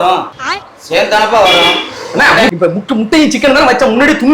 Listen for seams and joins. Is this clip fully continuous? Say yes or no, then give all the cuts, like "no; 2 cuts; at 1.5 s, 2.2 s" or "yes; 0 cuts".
no; 1 cut; at 2.5 s